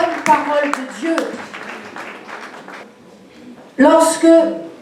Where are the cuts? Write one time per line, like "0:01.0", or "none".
0:02.8